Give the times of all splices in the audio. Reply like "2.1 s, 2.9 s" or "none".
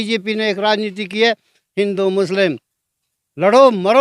none